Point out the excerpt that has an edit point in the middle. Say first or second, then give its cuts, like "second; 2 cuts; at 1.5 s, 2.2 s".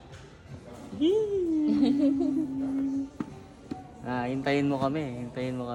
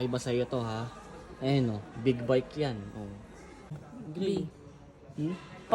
second; 1 cut; at 3.9 s